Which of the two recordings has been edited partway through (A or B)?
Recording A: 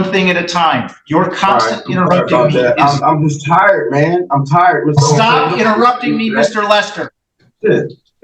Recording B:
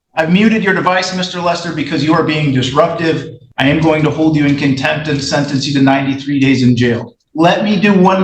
B